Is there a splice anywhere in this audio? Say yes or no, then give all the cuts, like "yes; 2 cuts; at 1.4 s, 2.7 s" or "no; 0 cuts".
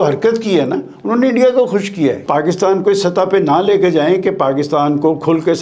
yes; 1 cut; at 2.2 s